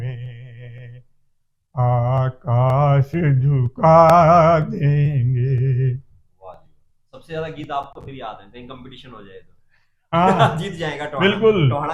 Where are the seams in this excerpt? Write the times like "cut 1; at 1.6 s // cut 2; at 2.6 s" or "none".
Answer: none